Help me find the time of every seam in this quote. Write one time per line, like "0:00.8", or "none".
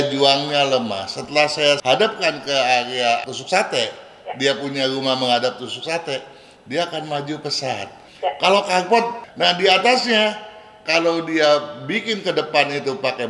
0:08.0
0:09.2

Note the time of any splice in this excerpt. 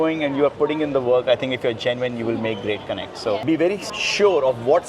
0:03.4

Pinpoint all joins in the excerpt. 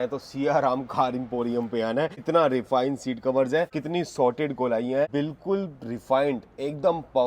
0:02.2
0:03.8
0:05.1

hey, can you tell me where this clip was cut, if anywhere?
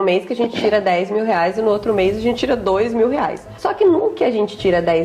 0:03.5

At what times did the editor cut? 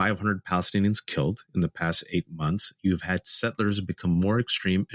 none

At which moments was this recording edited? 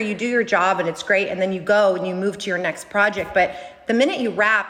none

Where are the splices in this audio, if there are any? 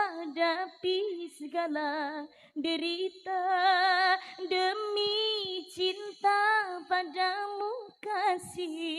none

